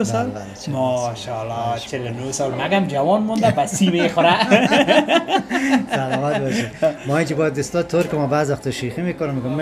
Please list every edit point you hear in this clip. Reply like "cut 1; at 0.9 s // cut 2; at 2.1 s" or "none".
none